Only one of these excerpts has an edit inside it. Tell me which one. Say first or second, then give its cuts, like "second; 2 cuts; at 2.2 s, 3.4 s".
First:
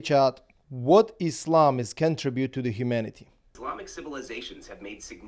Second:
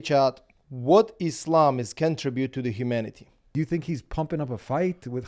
second; 1 cut; at 3.5 s